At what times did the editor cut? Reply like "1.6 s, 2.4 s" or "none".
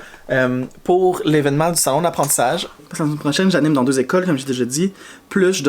2.8 s